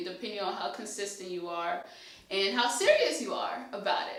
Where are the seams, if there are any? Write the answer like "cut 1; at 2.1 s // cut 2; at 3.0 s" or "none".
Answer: none